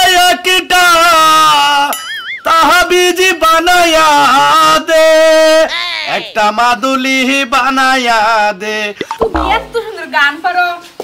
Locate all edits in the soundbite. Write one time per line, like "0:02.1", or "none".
0:09.0